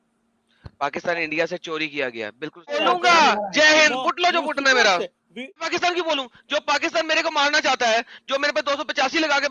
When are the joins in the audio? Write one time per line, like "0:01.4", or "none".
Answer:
0:02.8
0:05.7